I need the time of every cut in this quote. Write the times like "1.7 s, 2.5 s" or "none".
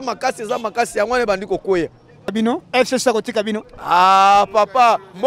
2.3 s